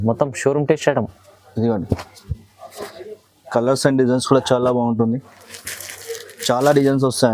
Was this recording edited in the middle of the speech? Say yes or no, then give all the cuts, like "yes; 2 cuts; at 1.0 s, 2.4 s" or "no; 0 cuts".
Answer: no; 0 cuts